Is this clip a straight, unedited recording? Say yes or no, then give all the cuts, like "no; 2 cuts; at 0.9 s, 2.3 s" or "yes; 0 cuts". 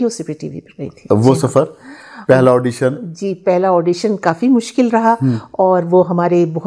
yes; 0 cuts